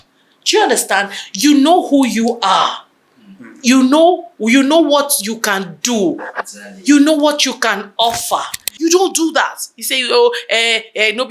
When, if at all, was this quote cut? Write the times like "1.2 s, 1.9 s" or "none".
8.6 s